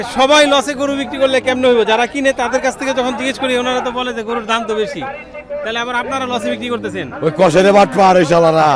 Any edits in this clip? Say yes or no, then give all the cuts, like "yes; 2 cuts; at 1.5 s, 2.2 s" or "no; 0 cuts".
no; 0 cuts